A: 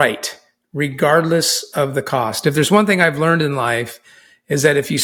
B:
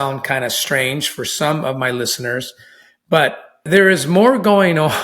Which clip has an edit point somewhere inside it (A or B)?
B